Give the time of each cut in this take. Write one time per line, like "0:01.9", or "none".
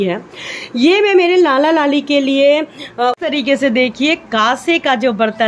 0:03.2